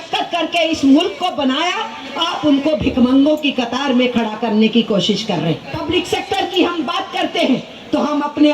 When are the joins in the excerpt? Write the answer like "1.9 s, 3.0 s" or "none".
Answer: 5.7 s